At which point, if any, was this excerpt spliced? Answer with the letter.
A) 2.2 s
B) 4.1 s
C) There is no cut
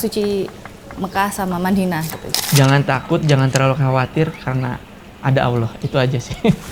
A